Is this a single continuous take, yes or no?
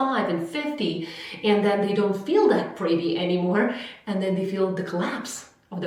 yes